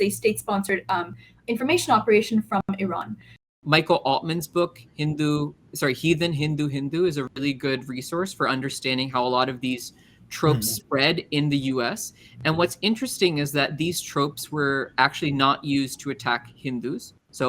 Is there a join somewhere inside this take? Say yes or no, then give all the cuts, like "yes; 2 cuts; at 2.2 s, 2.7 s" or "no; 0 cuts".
yes; 1 cut; at 3.5 s